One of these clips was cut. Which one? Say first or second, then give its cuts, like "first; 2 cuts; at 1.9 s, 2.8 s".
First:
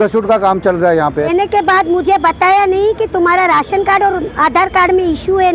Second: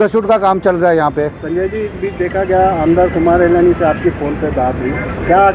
first; 1 cut; at 1.3 s